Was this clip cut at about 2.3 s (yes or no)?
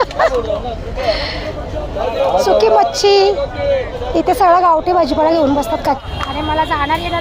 no